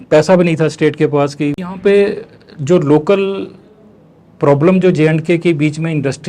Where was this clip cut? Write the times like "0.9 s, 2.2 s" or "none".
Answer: 1.7 s